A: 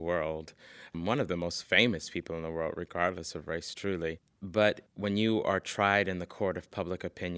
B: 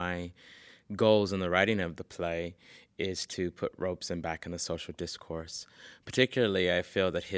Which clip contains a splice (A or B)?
A